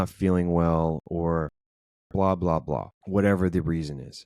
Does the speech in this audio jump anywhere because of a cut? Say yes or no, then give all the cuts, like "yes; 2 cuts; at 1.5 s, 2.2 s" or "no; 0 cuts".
yes; 1 cut; at 3.0 s